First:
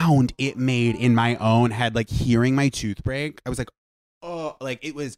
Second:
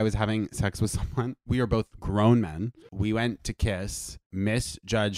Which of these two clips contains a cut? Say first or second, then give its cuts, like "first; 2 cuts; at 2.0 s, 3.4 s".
second; 3 cuts; at 1.4 s, 2.6 s, 4.2 s